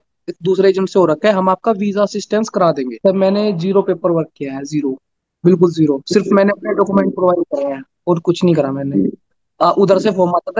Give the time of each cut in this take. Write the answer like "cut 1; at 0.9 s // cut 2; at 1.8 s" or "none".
cut 1; at 2.9 s